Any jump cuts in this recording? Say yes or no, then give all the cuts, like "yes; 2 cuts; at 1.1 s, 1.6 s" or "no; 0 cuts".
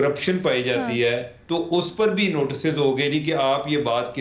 no; 0 cuts